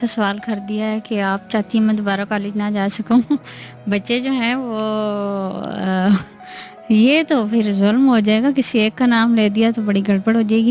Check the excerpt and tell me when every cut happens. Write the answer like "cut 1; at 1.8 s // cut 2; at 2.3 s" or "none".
none